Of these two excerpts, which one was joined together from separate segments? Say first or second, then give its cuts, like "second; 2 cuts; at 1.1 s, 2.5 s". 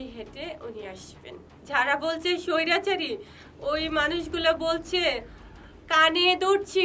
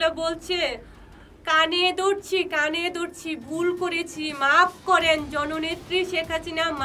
first; 1 cut; at 1.5 s